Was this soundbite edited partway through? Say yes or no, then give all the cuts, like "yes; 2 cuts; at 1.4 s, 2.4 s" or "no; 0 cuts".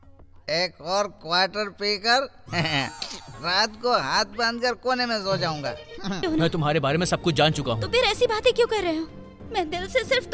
yes; 1 cut; at 6.2 s